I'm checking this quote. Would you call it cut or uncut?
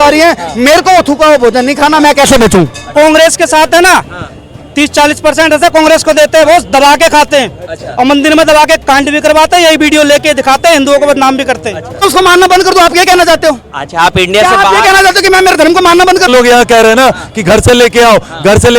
cut